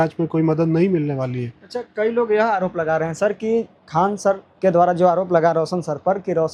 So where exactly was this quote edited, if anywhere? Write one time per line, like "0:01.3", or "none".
none